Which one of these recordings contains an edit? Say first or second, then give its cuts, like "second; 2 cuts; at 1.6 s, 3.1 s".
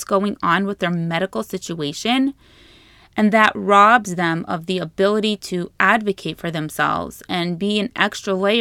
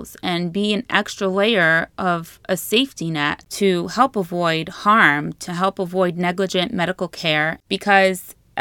second; 2 cuts; at 3.4 s, 7.6 s